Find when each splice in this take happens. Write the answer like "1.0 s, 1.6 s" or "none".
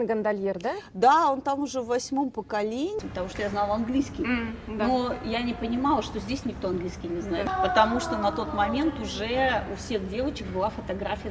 3.0 s, 7.5 s